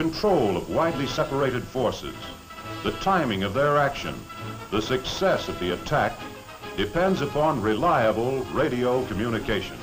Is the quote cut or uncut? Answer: cut